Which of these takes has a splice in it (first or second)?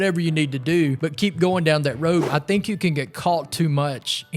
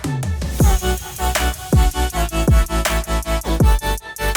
first